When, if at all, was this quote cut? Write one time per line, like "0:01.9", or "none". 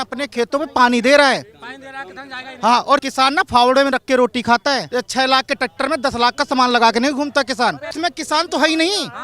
0:03.1
0:04.9
0:07.9